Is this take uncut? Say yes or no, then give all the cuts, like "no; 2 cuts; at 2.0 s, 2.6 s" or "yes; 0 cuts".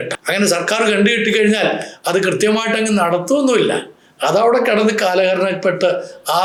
yes; 0 cuts